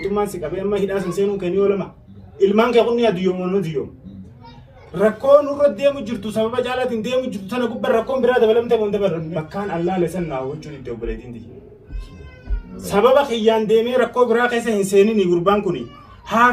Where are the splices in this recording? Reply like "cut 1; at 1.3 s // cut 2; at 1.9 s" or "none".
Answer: cut 1; at 9.3 s